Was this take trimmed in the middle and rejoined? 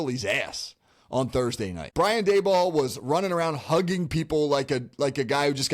yes; 1 cut; at 1.8 s

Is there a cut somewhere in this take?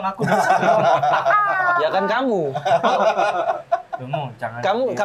no; 0 cuts

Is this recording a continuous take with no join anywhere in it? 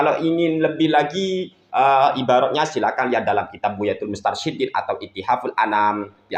yes; 0 cuts

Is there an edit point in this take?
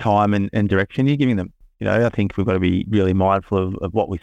no; 0 cuts

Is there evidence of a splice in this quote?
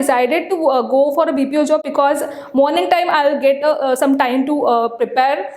no; 0 cuts

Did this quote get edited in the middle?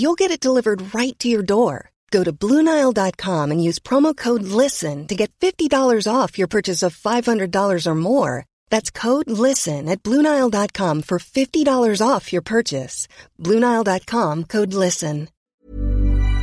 yes; 1 cut; at 15.4 s

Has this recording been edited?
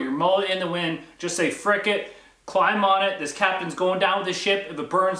no; 0 cuts

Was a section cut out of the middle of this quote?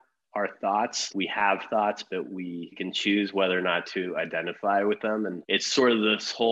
yes; 3 cuts; at 1.0 s, 2.8 s, 5.4 s

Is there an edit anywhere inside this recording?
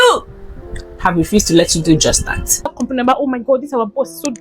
yes; 1 cut; at 2.8 s

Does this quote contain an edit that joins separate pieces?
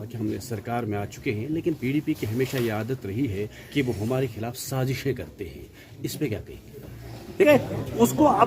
yes; 1 cut; at 7.5 s

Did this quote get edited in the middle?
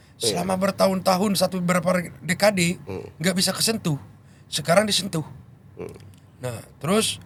no; 0 cuts

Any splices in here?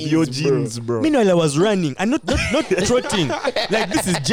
no; 0 cuts

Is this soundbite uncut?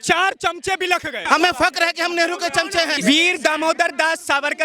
no; 2 cuts; at 1.2 s, 3.0 s

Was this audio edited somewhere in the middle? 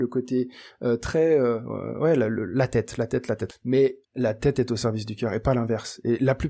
yes; 2 cuts; at 3.5 s, 4.0 s

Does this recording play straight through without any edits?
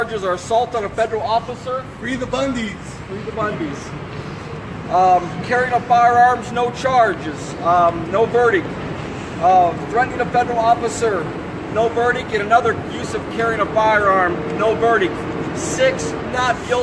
yes; 0 cuts

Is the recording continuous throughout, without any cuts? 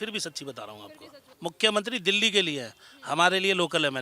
no; 1 cut; at 1.3 s

